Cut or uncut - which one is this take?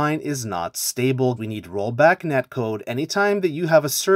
cut